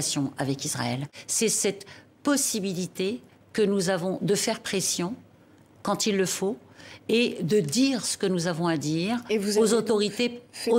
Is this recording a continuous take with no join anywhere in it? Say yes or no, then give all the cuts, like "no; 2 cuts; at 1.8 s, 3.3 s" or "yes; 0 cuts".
no; 1 cut; at 1.2 s